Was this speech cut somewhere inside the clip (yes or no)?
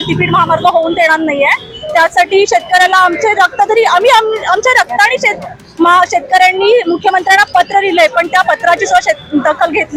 no